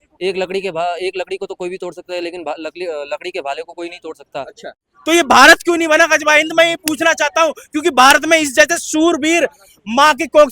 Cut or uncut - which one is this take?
cut